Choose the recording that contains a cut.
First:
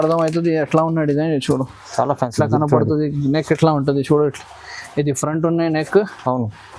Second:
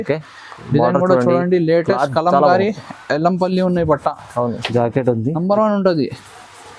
second; 1 cut; at 4.6 s

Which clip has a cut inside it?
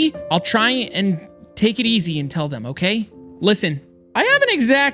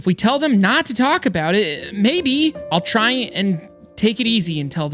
first; 1 cut; at 4.0 s

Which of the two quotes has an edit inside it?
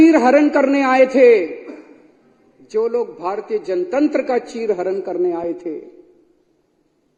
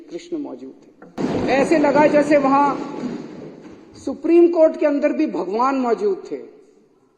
second; 1 cut; at 1.2 s

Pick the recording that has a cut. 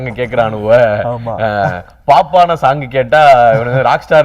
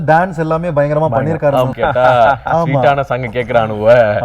second; 1 cut; at 1.7 s

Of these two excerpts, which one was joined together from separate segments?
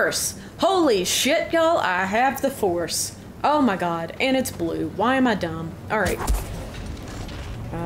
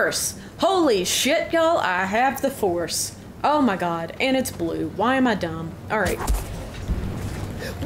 second; 1 cut; at 6.8 s

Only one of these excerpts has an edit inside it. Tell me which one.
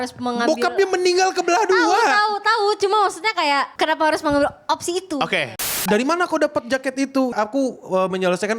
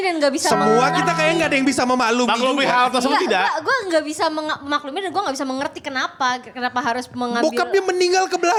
first; 3 cuts; at 3.7 s, 5.6 s, 7.3 s

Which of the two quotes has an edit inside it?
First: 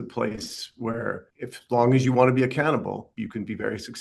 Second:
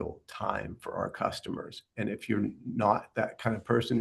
first; 2 cuts; at 1.3 s, 3.1 s

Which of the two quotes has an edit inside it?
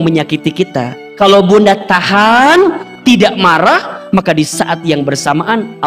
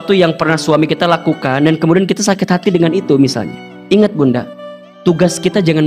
first; 1 cut; at 1.0 s

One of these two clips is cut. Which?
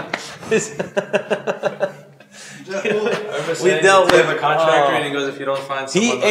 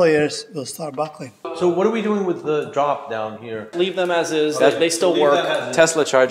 second; 2 cuts; at 1.5 s, 3.7 s

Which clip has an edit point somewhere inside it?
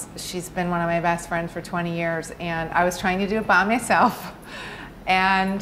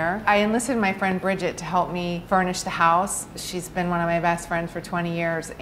second; 1 cut; at 2.2 s

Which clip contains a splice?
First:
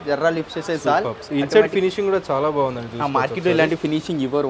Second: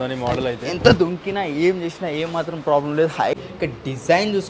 second; 1 cut; at 3.4 s

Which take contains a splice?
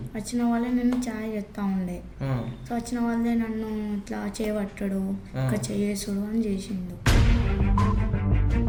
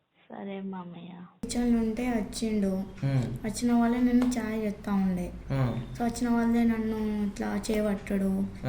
second; 1 cut; at 1.5 s

